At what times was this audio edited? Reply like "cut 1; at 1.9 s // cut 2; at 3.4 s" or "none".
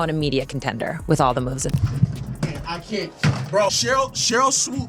cut 1; at 1.7 s